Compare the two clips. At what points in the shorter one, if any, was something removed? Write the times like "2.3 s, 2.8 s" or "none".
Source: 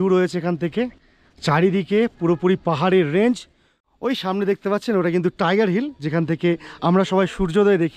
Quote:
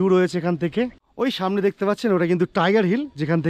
1.0 s